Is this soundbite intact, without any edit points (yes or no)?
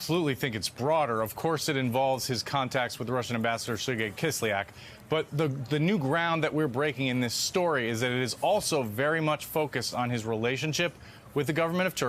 no